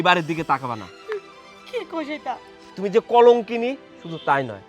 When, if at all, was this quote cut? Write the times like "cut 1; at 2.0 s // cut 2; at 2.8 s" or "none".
cut 1; at 2.6 s